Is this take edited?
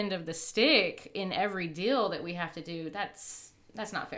no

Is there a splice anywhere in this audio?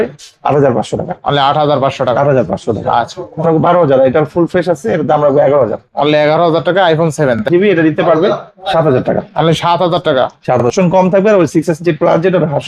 yes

